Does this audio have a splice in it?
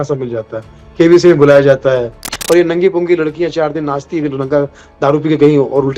yes; 1 cut; at 2.3 s

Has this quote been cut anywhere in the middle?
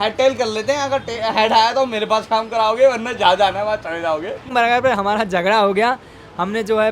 yes; 1 cut; at 4.3 s

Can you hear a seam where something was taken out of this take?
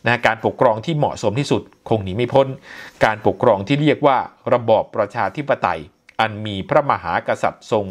no; 0 cuts

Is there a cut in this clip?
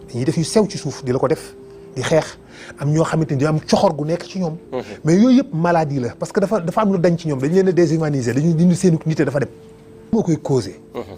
yes; 1 cut; at 10.1 s

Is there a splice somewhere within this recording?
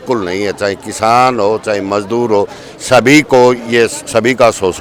no; 0 cuts

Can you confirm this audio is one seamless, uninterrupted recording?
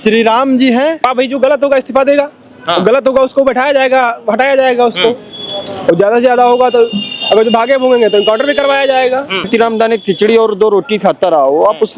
no; 2 cuts; at 1.0 s, 9.5 s

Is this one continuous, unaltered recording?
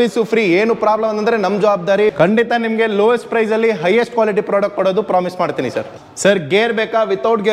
no; 2 cuts; at 2.1 s, 6.0 s

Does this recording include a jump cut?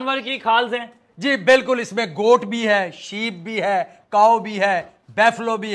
no; 0 cuts

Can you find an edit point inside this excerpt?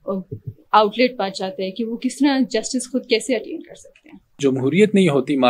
yes; 1 cut; at 4.4 s

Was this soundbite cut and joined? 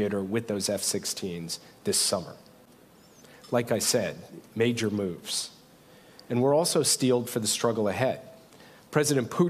no; 0 cuts

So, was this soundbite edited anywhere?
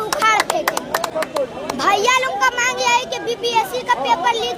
no; 0 cuts

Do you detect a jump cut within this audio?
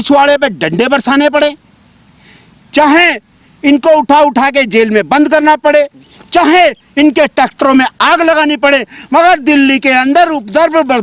no; 0 cuts

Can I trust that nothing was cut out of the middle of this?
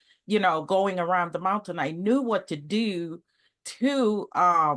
yes; 0 cuts

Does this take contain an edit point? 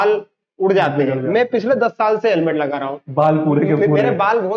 no; 0 cuts

